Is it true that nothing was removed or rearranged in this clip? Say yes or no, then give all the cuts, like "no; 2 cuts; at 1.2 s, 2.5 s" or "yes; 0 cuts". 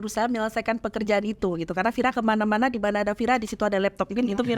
yes; 0 cuts